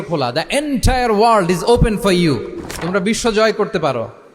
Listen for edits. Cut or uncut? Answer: uncut